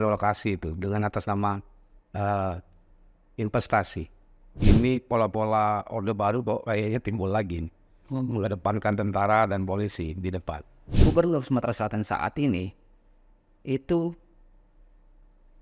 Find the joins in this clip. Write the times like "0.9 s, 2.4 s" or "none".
4.5 s, 10.9 s